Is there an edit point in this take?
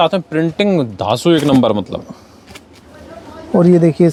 no; 0 cuts

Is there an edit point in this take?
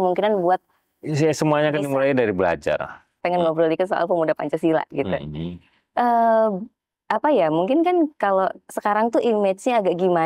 yes; 1 cut; at 3.2 s

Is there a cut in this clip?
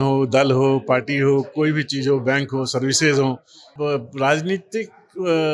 yes; 1 cut; at 3.6 s

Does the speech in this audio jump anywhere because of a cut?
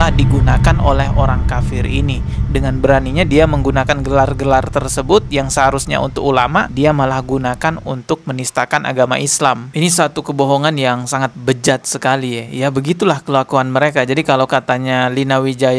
no; 0 cuts

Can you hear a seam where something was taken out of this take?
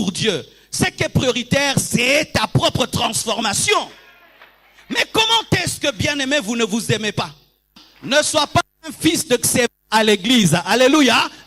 yes; 1 cut; at 7.9 s

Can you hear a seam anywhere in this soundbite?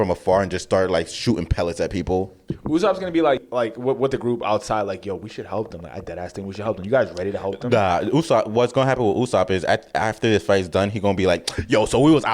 yes; 1 cut; at 3.4 s

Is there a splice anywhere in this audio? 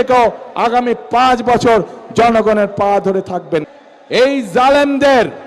yes; 1 cut; at 3.7 s

